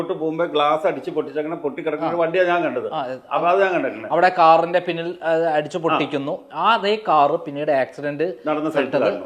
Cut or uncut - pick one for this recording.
uncut